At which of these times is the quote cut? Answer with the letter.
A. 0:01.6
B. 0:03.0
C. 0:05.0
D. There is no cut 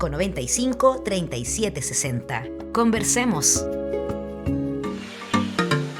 C